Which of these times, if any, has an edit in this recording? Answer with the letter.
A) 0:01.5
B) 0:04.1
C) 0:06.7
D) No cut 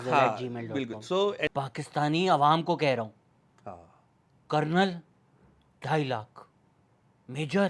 A